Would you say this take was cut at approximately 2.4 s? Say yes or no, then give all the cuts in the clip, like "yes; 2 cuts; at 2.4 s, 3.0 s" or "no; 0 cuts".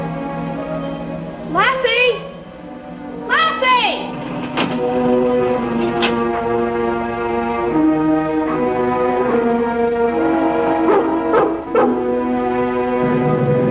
no; 0 cuts